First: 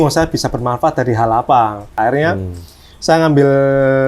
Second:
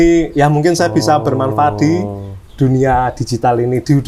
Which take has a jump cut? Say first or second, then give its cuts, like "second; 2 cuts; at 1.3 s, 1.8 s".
first; 1 cut; at 1.9 s